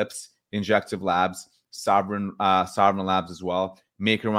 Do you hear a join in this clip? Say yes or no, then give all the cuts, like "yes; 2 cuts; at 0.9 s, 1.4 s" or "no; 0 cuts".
no; 0 cuts